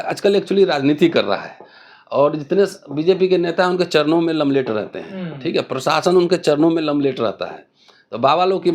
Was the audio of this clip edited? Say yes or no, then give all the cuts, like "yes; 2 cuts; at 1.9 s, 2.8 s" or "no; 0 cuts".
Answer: no; 0 cuts